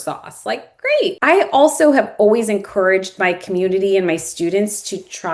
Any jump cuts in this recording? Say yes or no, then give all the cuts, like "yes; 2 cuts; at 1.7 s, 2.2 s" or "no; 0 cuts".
yes; 1 cut; at 1.2 s